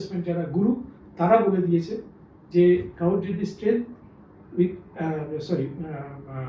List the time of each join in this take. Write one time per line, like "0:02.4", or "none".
none